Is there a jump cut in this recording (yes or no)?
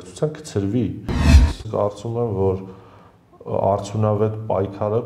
yes